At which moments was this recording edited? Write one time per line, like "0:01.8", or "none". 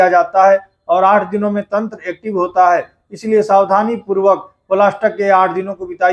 none